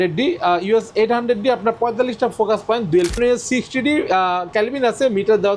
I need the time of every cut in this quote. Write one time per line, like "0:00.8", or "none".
0:03.2